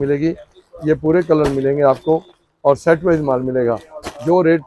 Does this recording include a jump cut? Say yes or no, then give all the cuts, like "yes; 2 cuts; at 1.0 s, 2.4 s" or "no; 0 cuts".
no; 0 cuts